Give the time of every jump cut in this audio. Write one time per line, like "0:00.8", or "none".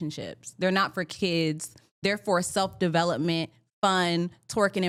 none

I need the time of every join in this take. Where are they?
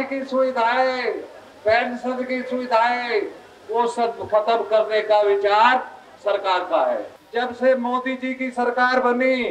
0:07.2

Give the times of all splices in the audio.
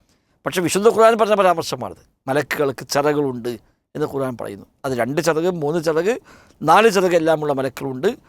none

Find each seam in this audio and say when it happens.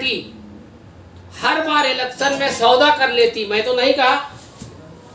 none

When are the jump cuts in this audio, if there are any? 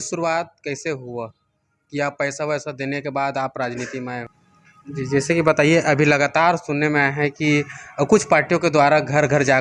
0:04.2

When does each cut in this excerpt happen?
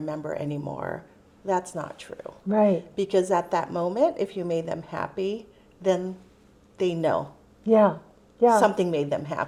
none

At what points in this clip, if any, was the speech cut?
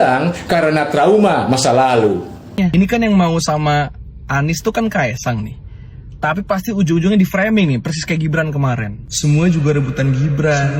0:02.6

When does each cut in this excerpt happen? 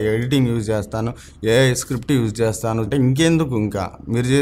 0:02.9

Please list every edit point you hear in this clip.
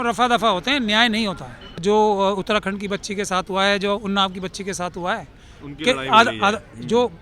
0:01.8

